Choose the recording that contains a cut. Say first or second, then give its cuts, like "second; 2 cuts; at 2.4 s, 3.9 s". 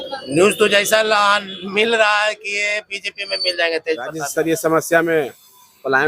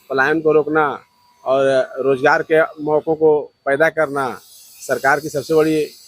first; 1 cut; at 4.2 s